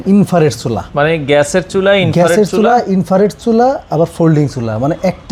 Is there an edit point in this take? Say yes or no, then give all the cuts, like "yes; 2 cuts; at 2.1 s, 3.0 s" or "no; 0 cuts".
no; 0 cuts